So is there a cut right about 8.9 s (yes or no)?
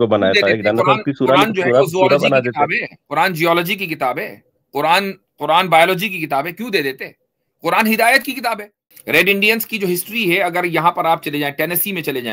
yes